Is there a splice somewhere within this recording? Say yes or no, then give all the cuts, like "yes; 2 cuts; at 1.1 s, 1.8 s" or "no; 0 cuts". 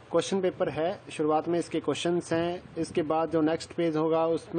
yes; 1 cut; at 2.3 s